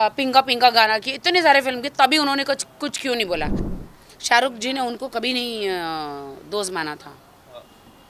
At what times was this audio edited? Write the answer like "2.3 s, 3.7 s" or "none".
3.7 s

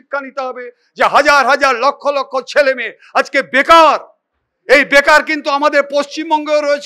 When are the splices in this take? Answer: none

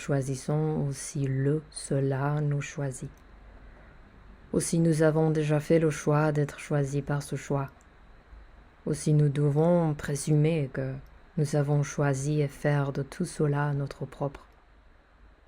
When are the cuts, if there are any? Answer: 14.5 s

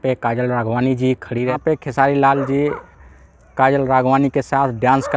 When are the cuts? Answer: 1.6 s

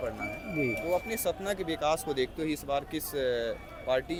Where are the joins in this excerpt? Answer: none

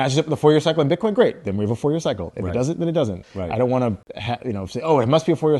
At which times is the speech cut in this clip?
3.3 s, 4.1 s

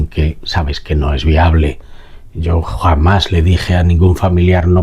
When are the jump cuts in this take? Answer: none

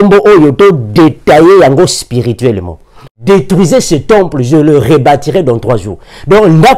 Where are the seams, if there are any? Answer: 3.0 s

